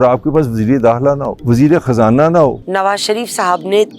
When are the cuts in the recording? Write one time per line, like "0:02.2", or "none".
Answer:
0:01.3
0:02.6